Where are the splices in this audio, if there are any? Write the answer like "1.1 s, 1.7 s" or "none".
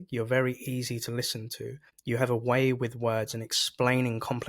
1.9 s